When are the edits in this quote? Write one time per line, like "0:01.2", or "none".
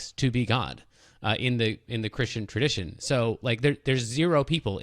none